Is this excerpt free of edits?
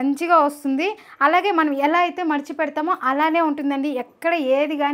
yes; 0 cuts

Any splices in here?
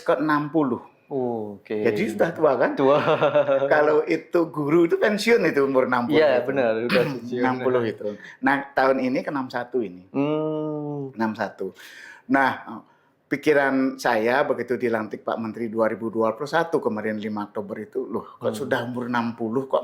no; 0 cuts

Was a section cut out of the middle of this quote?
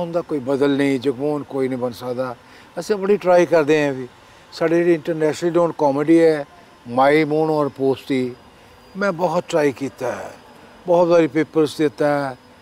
no; 0 cuts

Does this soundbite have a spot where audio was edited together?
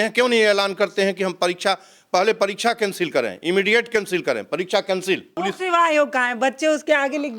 yes; 1 cut; at 5.3 s

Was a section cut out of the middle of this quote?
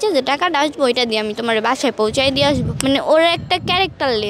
yes; 1 cut; at 2.7 s

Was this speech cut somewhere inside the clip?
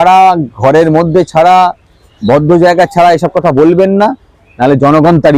no; 0 cuts

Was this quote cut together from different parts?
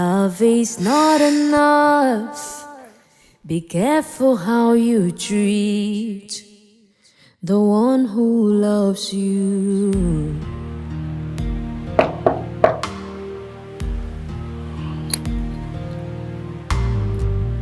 no; 0 cuts

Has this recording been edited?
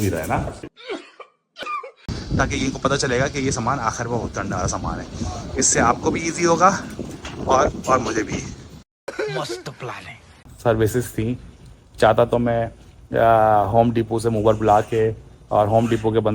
yes; 2 cuts; at 2.1 s, 10.4 s

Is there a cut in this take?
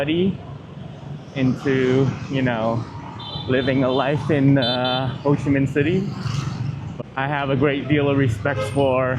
yes; 1 cut; at 6.8 s

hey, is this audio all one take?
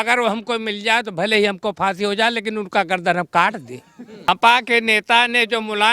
no; 1 cut; at 4.3 s

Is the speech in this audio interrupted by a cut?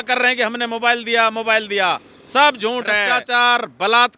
yes; 1 cut; at 3.0 s

